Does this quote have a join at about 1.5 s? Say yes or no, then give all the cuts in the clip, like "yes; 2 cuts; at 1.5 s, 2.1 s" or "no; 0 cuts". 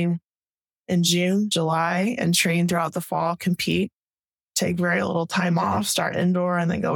yes; 1 cut; at 1.5 s